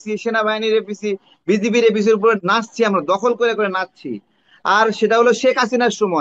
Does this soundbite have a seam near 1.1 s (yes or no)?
no